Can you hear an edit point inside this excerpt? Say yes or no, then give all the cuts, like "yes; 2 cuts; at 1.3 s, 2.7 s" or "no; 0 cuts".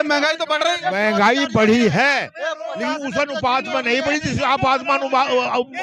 no; 0 cuts